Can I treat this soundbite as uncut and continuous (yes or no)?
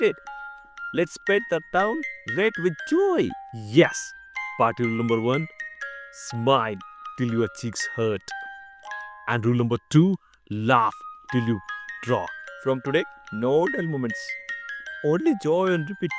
yes